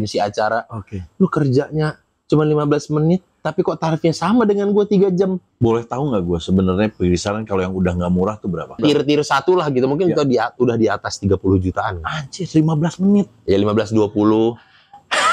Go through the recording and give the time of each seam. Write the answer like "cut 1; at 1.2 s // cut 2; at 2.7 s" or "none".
cut 1; at 5.4 s // cut 2; at 8.8 s